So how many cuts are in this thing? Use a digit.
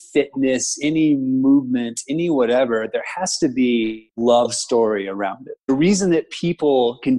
2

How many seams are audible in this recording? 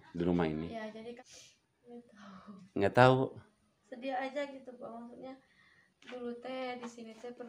1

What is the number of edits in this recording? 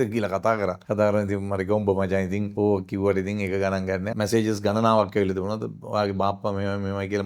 3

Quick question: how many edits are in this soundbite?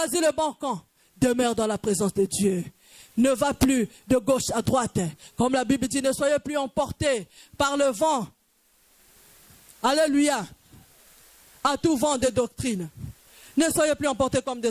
0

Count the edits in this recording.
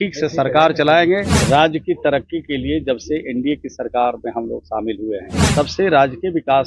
2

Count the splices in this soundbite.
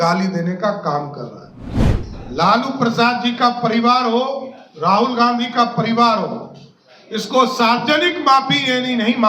1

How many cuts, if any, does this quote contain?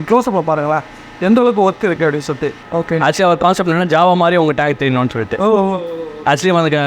1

